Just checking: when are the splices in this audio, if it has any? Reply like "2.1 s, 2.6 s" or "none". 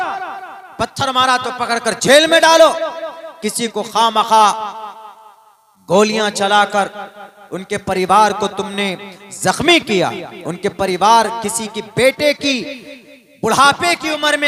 none